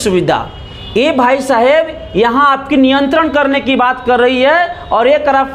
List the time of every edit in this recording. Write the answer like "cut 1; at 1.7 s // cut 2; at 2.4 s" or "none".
none